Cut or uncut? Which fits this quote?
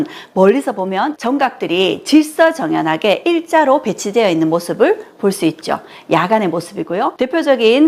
cut